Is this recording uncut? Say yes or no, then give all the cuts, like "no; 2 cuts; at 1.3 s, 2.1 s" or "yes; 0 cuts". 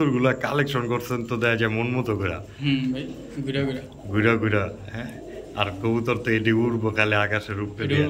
yes; 0 cuts